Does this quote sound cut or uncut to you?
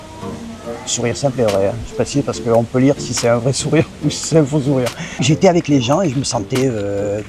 cut